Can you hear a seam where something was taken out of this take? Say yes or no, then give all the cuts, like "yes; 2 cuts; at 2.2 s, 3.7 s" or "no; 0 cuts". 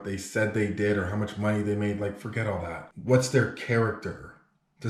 no; 0 cuts